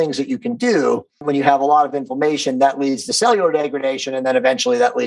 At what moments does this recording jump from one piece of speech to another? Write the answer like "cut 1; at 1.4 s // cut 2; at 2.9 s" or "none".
cut 1; at 1.2 s